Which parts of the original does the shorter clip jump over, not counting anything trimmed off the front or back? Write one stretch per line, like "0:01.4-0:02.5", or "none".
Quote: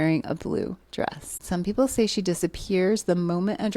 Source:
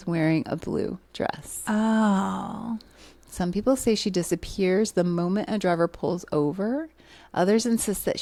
0:01.5-0:03.2